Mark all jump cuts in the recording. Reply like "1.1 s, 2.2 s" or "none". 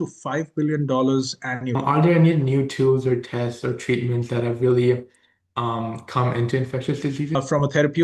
1.8 s, 7.3 s

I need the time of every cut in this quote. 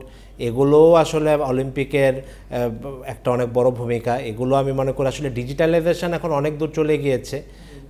none

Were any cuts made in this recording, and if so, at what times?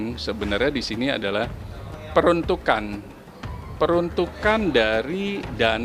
none

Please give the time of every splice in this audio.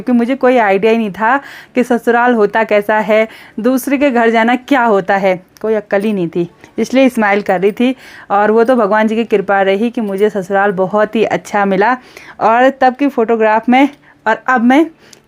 none

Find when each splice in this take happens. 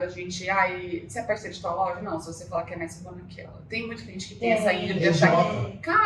none

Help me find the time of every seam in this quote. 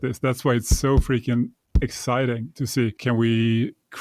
3.0 s

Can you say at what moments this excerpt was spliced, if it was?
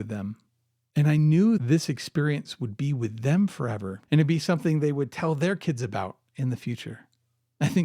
1.6 s, 3.9 s

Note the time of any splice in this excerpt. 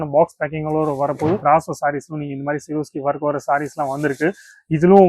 1.4 s

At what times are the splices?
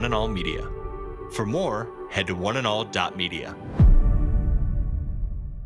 none

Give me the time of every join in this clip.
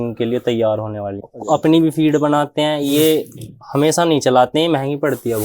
1.3 s

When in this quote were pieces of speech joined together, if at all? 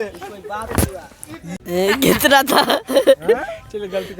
1.5 s

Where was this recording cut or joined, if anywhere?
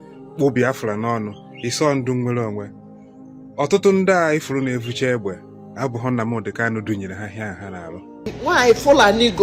8.3 s

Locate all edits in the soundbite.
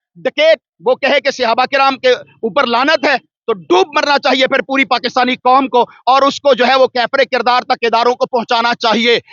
none

